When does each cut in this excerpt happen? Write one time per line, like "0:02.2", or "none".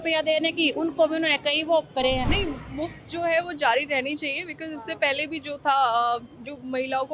0:02.3